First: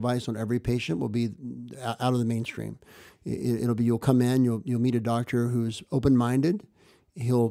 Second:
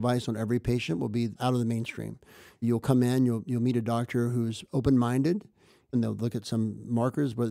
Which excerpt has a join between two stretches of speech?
second; 3 cuts; at 1.4 s, 2.6 s, 5.9 s

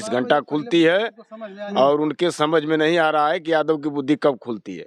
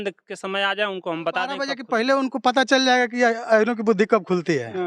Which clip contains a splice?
second; 1 cut; at 1.6 s

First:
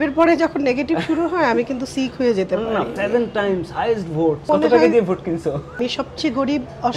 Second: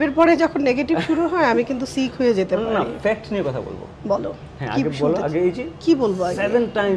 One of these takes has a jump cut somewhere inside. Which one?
first; 3 cuts; at 3.0 s, 4.5 s, 5.8 s

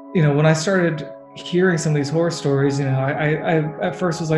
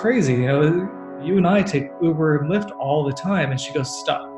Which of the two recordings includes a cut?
second; 1 cut; at 1.1 s

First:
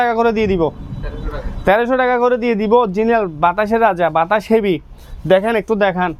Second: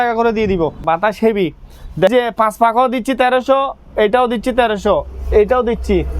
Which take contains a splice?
second; 2 cuts; at 0.8 s, 2.1 s

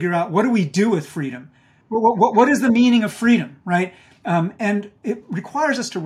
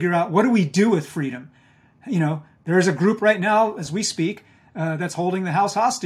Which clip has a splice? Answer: first; 1 cut; at 1.8 s

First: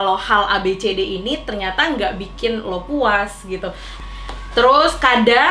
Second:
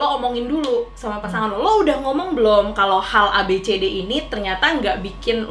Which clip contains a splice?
first; 1 cut; at 3.9 s

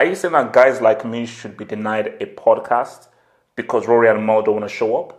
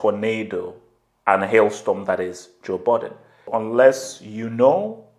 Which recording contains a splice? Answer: second; 1 cut; at 3.5 s

